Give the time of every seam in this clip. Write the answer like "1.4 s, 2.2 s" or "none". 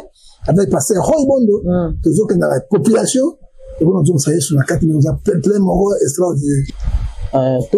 6.7 s